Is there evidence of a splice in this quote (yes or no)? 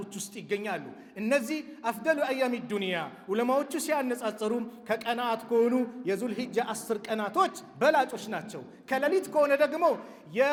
no